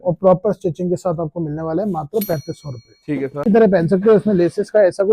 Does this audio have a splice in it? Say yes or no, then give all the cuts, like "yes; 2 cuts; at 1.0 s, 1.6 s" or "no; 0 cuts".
yes; 1 cut; at 3.5 s